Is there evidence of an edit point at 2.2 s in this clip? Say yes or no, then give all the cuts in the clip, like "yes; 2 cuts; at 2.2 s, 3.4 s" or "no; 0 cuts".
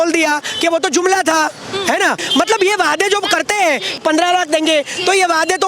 no; 0 cuts